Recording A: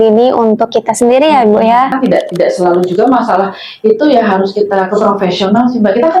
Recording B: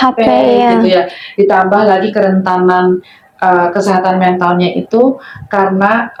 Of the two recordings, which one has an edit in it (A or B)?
A